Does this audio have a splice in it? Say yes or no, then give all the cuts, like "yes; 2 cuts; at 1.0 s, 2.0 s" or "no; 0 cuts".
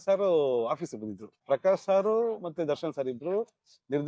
yes; 1 cut; at 1.3 s